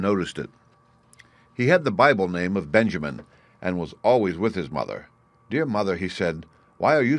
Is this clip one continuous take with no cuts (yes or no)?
no